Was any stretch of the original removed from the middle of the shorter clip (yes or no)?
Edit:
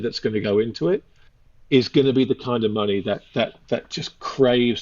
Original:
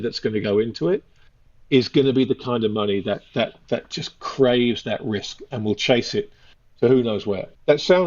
no